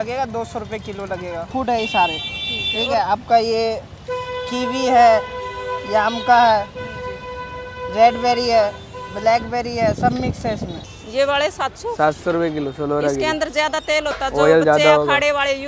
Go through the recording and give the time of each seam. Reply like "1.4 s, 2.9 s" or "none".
1.5 s, 10.8 s